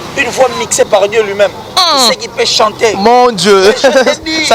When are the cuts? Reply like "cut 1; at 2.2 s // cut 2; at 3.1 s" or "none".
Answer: none